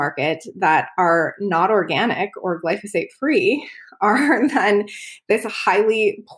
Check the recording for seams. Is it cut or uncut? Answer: uncut